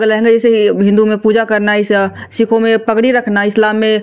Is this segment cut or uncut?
uncut